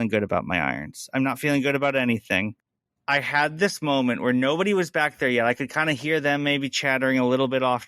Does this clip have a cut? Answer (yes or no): yes